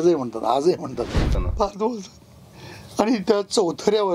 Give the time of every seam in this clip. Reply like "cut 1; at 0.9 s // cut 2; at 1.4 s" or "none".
cut 1; at 1.4 s